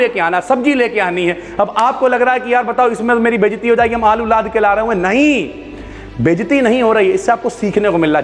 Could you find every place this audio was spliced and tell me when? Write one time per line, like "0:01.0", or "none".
none